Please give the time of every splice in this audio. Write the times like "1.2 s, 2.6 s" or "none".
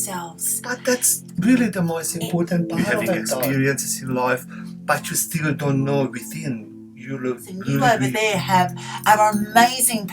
3.5 s, 7.8 s